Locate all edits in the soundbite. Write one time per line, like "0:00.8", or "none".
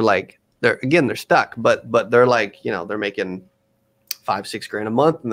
none